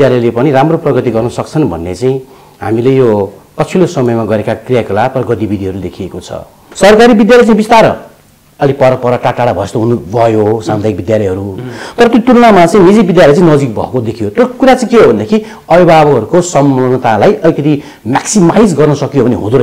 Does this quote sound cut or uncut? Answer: cut